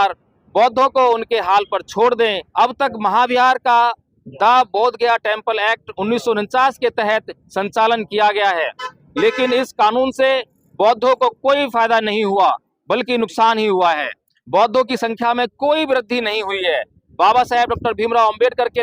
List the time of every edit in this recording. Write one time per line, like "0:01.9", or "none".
0:02.4